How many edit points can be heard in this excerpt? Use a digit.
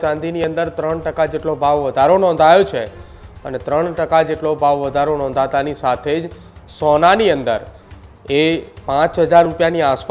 0